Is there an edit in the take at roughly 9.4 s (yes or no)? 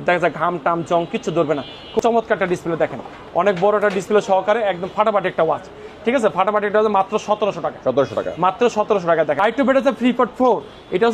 yes